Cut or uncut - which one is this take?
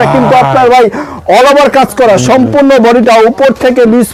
uncut